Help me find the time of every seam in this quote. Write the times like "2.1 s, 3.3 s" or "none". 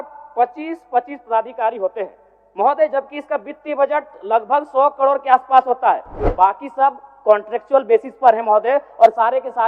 6.2 s